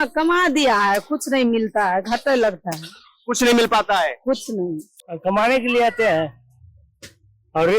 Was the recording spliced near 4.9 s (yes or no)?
yes